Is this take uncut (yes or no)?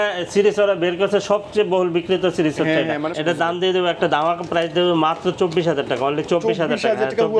no